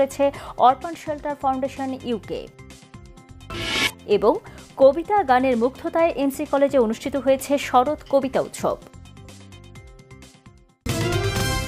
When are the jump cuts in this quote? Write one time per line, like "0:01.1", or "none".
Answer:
0:10.8